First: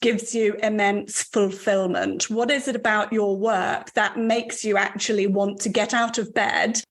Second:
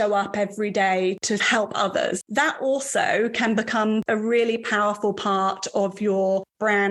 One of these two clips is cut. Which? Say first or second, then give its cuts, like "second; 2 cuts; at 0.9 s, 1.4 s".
second; 3 cuts; at 1.2 s, 2.2 s, 4.0 s